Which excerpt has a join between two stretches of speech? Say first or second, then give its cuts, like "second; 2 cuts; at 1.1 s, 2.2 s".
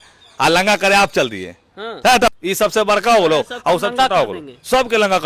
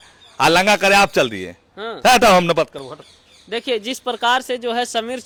first; 1 cut; at 2.3 s